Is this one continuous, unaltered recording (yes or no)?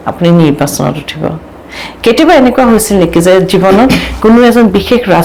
yes